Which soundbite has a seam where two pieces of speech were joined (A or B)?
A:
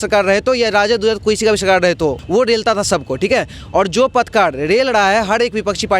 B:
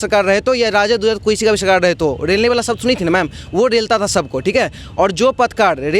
A